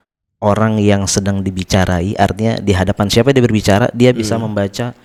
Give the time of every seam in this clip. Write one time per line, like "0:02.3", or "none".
none